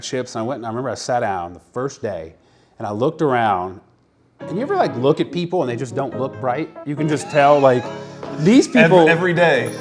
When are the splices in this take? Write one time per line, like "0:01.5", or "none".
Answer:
none

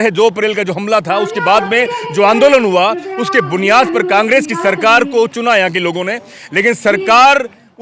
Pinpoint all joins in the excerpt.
none

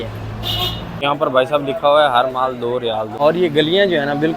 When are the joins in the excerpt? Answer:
0:01.0
0:03.1

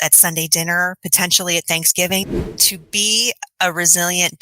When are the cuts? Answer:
0:02.5

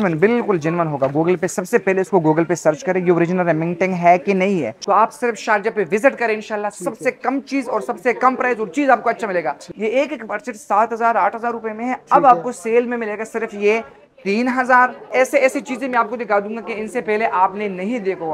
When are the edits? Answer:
0:04.7
0:09.7
0:15.0

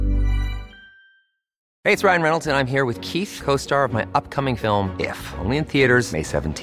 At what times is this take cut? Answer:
0:01.7

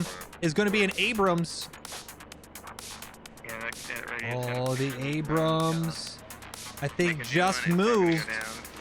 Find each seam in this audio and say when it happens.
0:01.5

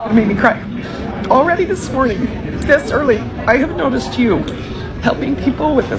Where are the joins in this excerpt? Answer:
none

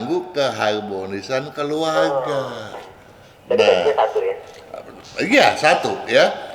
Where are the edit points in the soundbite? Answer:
none

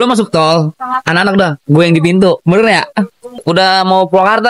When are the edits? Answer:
0:03.4

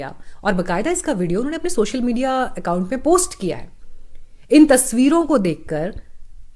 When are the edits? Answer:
none

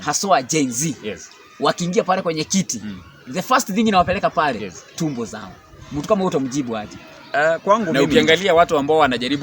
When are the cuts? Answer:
0:08.0

